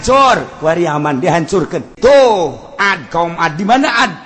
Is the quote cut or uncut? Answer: cut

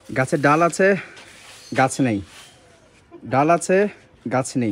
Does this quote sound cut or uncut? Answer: uncut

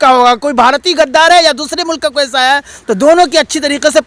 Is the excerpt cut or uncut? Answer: uncut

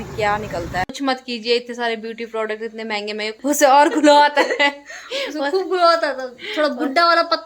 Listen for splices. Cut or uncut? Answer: cut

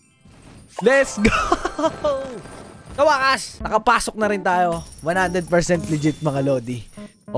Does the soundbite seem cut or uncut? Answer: uncut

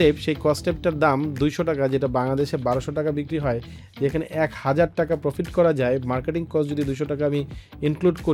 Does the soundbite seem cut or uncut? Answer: uncut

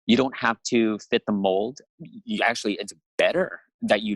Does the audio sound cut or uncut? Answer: cut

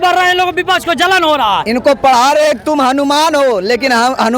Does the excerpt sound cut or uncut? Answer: cut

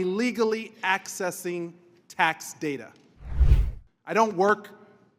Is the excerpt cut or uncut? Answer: cut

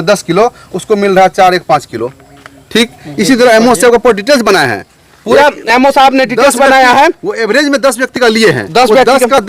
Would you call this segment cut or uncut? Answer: uncut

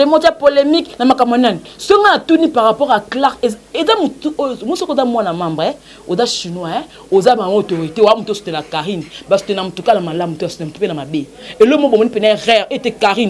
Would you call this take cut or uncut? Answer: uncut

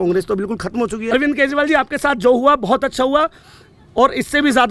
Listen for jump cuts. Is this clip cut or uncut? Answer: cut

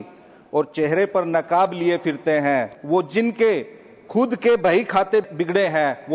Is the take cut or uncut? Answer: cut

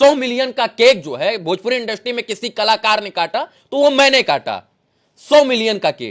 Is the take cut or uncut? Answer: uncut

